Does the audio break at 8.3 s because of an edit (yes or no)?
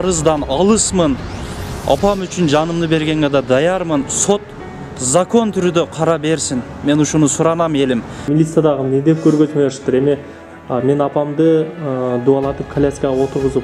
yes